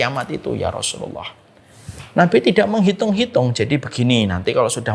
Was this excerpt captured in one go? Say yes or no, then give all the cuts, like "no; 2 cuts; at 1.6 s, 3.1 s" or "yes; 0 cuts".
yes; 0 cuts